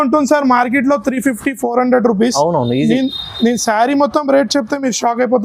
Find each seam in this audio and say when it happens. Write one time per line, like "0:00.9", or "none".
none